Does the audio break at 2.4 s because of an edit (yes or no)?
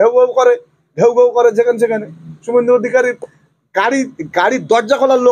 no